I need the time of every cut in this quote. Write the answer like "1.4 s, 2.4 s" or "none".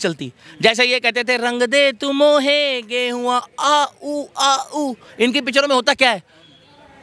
none